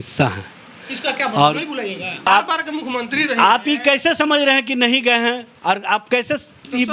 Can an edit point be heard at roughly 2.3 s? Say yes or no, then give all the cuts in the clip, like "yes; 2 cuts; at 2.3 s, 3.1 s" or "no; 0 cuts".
yes; 1 cut; at 2.3 s